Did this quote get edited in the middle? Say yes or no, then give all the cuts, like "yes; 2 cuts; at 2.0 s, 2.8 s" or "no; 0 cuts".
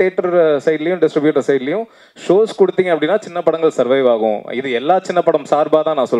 no; 0 cuts